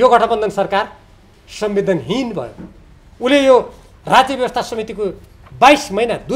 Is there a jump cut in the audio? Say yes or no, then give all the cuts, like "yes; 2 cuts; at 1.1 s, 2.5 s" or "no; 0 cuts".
no; 0 cuts